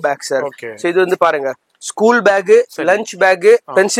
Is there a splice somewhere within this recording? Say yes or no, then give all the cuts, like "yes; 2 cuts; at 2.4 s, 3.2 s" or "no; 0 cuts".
no; 0 cuts